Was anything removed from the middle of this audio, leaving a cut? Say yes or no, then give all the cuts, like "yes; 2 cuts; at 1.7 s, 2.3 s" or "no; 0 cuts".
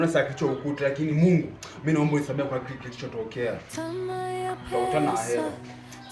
yes; 1 cut; at 3.7 s